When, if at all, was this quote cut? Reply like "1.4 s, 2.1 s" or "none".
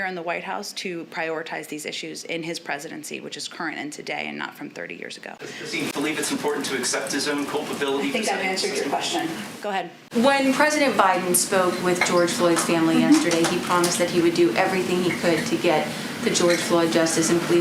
10.0 s